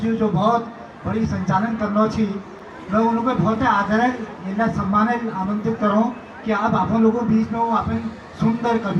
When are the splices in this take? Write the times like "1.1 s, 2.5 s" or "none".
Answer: none